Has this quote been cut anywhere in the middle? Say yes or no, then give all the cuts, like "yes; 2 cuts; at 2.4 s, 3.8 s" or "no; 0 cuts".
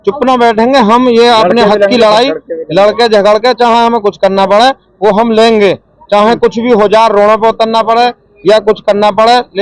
no; 0 cuts